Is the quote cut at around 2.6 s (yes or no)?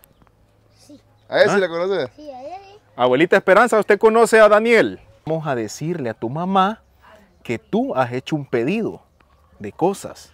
no